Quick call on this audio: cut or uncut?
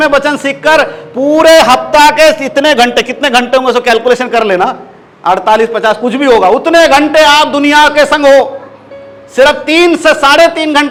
uncut